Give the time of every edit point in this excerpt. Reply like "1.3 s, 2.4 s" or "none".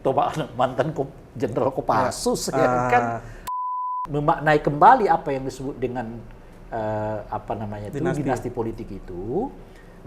3.5 s